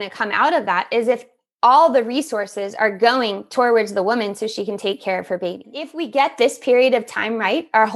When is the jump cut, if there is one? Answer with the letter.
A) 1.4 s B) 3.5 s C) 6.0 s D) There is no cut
C